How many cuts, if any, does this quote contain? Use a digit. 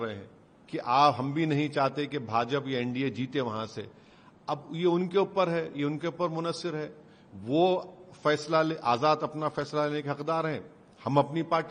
0